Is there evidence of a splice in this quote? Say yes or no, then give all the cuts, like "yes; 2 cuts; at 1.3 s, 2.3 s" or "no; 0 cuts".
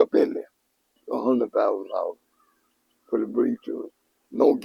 yes; 1 cut; at 1.1 s